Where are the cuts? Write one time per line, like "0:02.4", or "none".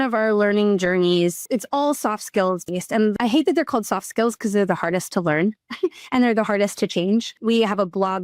0:01.4
0:03.1
0:07.4